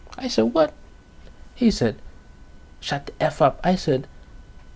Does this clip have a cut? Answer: no; 0 cuts

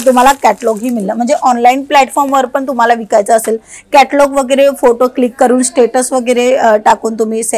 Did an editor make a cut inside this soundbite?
no; 0 cuts

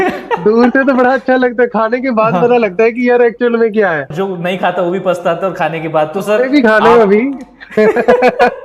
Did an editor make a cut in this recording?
yes; 1 cut; at 4.1 s

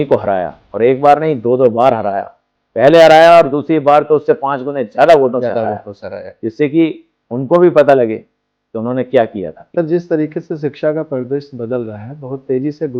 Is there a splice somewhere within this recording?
yes; 1 cut; at 9.6 s

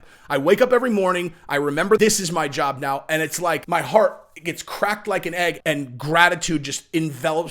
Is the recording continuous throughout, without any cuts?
no; 3 cuts; at 2.0 s, 3.6 s, 5.6 s

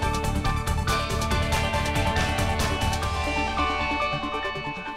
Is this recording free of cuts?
no; 1 cut; at 1.0 s

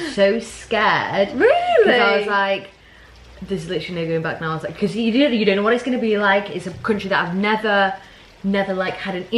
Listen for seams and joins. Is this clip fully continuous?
yes; 0 cuts

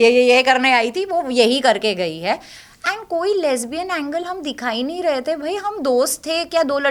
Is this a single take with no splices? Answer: yes; 0 cuts

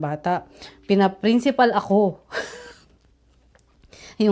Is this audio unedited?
yes; 0 cuts

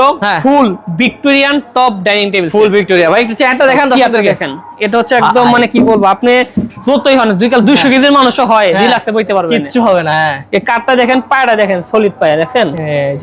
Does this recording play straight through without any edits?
yes; 0 cuts

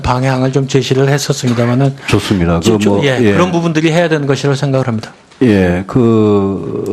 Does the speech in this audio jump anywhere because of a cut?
no; 0 cuts

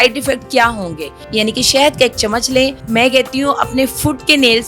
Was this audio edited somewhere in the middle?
yes; 2 cuts; at 1.2 s, 2.8 s

